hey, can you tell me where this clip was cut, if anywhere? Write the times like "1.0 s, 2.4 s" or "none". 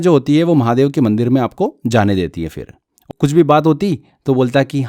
3.1 s